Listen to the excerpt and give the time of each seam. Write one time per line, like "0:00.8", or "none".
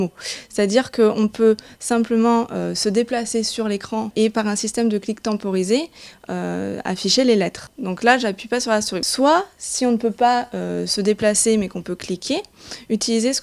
0:11.4